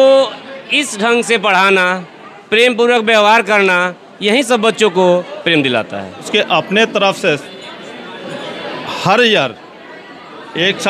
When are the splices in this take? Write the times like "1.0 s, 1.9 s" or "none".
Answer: 6.3 s

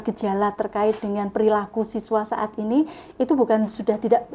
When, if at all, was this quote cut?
none

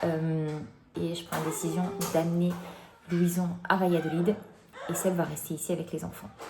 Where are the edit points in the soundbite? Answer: 0.9 s, 4.7 s

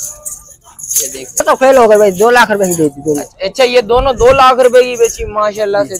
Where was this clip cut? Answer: 1.4 s

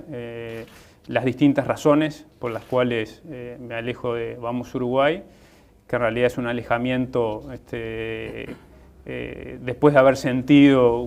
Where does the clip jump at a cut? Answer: none

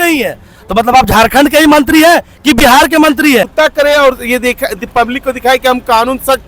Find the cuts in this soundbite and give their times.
3.5 s

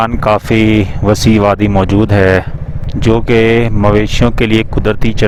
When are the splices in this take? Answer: none

